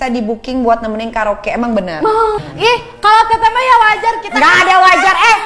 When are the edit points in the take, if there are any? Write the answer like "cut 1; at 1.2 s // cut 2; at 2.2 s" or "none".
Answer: cut 1; at 2.4 s